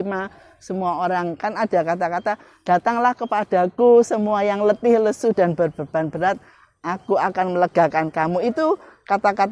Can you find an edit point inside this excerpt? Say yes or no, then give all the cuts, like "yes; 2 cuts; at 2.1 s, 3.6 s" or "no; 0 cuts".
no; 0 cuts